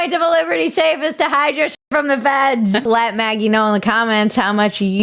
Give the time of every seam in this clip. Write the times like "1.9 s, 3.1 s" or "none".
2.9 s